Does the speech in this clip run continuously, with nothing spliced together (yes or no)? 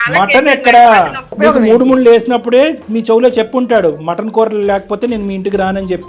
yes